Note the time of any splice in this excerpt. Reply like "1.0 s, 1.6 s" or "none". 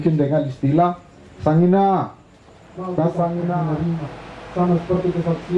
3.6 s